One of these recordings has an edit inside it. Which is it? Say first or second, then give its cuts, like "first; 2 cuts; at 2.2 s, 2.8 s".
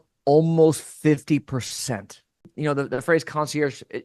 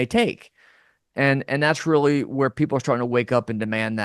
first; 1 cut; at 2.5 s